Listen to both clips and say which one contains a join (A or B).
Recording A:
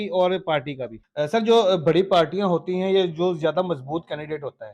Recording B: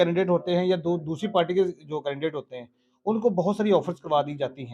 A